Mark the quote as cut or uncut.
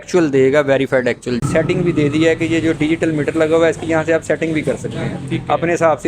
cut